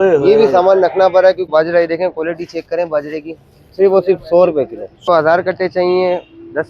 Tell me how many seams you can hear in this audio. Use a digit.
2